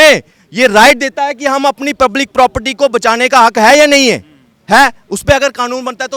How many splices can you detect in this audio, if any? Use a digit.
0